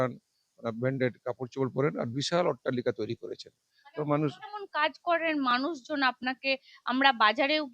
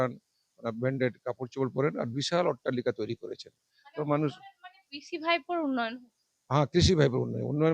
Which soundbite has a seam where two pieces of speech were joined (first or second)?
first